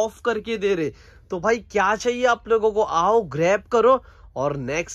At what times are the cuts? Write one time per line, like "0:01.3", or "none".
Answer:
none